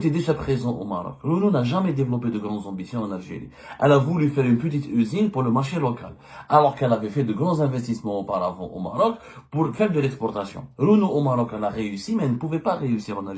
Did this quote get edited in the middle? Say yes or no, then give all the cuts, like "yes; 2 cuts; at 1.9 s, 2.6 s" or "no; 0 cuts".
no; 0 cuts